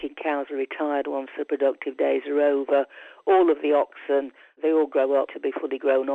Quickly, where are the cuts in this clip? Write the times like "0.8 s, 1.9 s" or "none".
4.6 s, 5.3 s